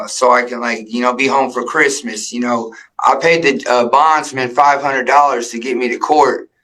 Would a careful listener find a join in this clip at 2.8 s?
yes; 1 cut; at 2.8 s

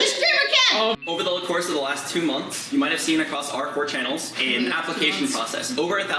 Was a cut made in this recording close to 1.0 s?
yes; 1 cut; at 1.0 s

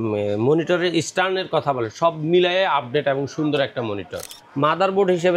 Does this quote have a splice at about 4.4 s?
yes; 1 cut; at 4.4 s

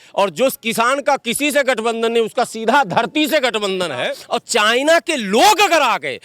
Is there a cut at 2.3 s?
no; 1 cut; at 4.2 s

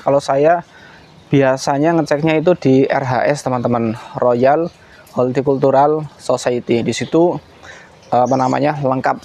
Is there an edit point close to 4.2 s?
no; 0 cuts

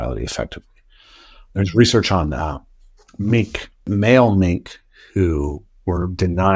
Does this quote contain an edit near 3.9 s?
yes; 1 cut; at 3.9 s

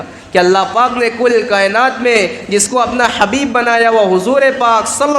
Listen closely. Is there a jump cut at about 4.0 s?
no; 0 cuts

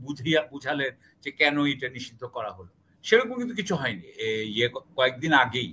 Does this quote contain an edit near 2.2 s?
no; 1 cut; at 4.1 s

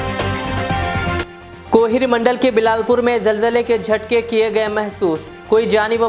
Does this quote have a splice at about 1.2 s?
no; 0 cuts

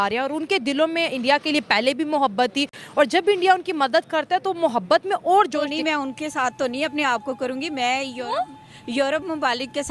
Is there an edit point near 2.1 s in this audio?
no; 1 cut; at 5.7 s

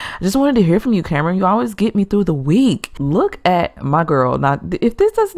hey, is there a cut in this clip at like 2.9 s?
yes; 1 cut; at 2.9 s

